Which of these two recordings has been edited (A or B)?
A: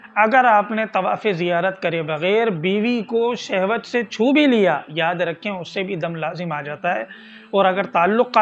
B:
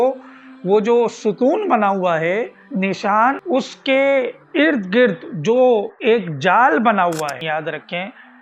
B